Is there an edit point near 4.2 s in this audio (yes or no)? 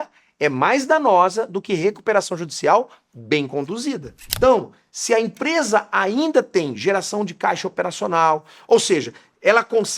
yes